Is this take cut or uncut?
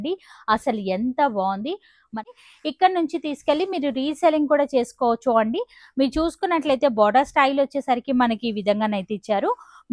cut